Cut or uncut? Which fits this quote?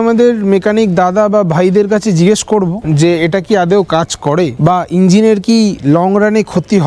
uncut